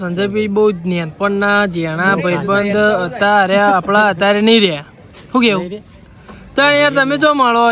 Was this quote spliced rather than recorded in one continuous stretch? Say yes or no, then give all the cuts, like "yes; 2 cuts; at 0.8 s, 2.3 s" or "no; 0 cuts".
no; 0 cuts